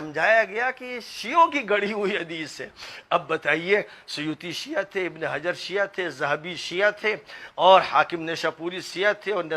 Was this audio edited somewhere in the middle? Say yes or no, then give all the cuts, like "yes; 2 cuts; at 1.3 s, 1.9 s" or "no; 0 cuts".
no; 0 cuts